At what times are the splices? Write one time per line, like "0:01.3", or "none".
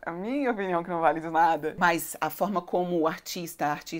0:01.7